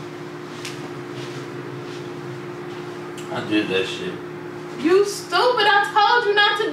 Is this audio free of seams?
yes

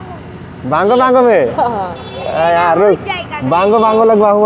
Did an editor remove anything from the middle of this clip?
no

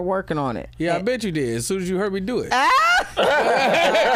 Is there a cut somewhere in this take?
no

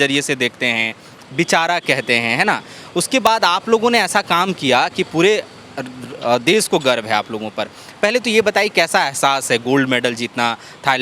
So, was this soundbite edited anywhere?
no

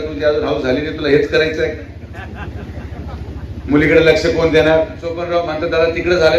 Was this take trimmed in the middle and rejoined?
yes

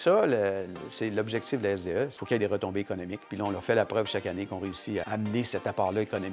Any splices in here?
no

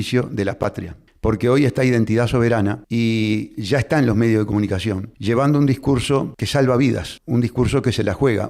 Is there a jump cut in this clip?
yes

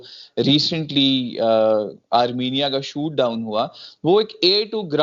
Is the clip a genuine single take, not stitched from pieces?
yes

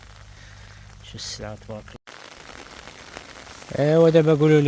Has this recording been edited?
yes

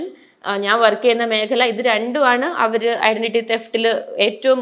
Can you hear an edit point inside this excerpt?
no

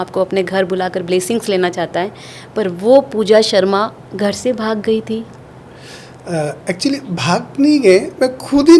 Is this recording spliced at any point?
no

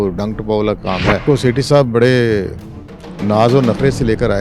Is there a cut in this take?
yes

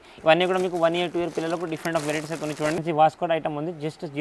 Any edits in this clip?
yes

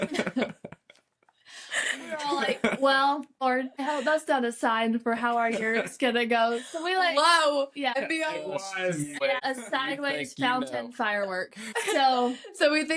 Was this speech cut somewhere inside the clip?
yes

